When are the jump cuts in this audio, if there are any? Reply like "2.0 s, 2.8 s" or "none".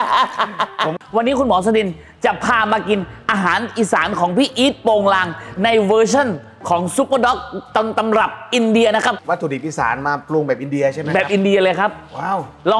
0.9 s